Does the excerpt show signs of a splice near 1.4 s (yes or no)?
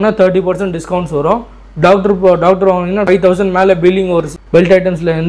no